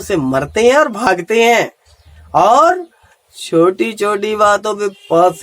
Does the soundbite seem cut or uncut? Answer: uncut